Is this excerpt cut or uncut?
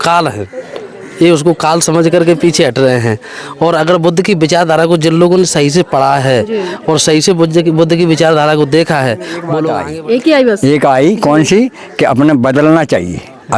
cut